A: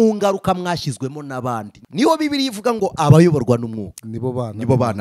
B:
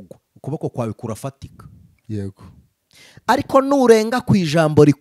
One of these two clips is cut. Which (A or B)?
A